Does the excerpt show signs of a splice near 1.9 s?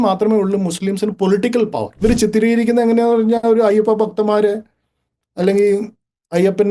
yes; 1 cut; at 1.9 s

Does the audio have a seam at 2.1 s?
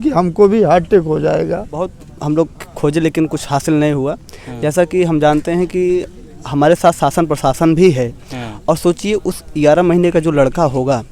yes; 1 cut; at 2.1 s

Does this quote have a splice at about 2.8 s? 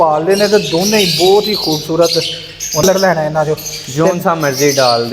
yes; 1 cut; at 2.8 s

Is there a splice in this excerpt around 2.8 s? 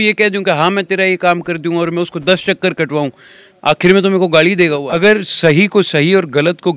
no; 1 cut; at 4.9 s

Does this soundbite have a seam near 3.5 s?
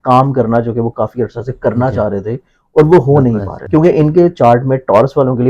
yes; 1 cut; at 3.5 s

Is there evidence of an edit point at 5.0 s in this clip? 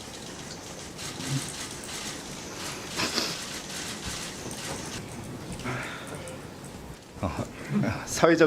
yes; 2 cuts; at 5.0 s, 6.9 s

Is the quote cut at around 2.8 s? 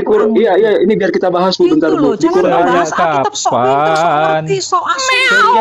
no; 0 cuts

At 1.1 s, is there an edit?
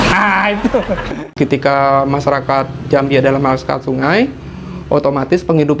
yes; 1 cut; at 1.1 s

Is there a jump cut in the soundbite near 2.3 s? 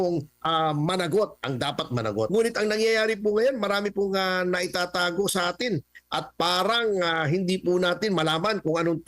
yes; 1 cut; at 2.3 s

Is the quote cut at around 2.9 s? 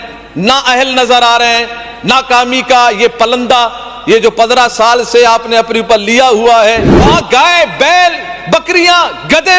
no; 1 cut; at 6.9 s

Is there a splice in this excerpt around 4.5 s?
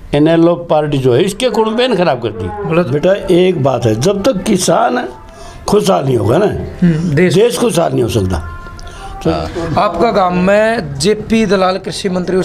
no; 2 cuts; at 2.9 s, 9.3 s

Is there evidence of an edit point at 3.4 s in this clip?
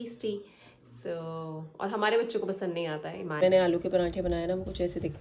yes; 1 cut; at 3.4 s

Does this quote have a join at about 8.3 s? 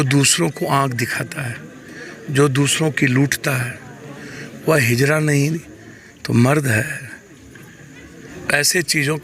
yes; 1 cut; at 8.3 s

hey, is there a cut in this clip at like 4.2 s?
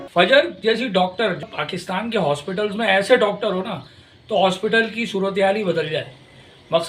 no; 1 cut; at 1.4 s

